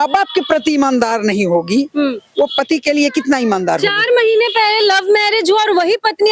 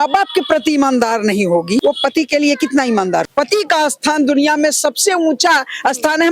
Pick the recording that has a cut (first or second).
second